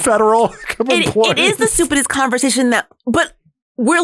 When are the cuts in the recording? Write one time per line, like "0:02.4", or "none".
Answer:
0:02.9